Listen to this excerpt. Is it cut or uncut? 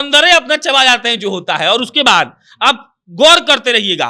uncut